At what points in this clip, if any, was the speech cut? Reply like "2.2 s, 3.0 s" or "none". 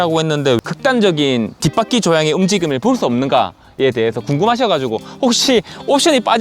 none

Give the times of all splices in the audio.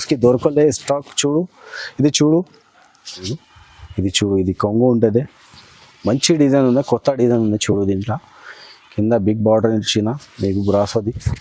3.3 s

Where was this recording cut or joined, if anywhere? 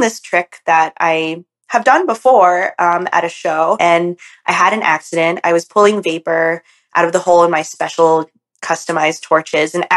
3.8 s

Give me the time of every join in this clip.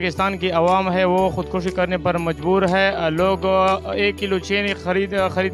none

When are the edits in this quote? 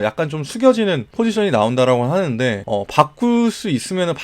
1.1 s, 2.6 s

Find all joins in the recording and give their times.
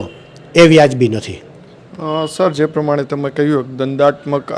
none

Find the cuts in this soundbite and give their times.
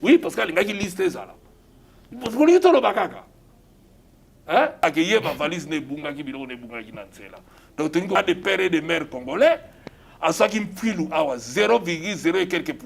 4.8 s, 8.2 s

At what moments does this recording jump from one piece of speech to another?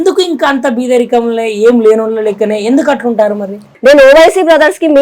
3.6 s

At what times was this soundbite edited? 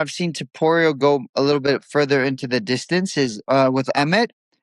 3.4 s

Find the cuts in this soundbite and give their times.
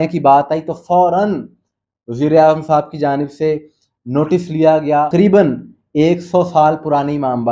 5.1 s

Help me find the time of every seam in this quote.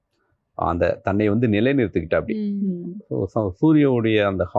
none

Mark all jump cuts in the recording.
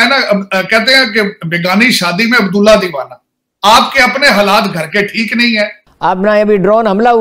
5.8 s

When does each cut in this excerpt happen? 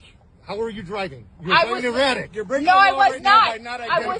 2.7 s

